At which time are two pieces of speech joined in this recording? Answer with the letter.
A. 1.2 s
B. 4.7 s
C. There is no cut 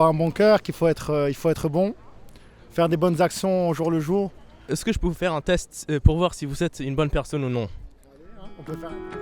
B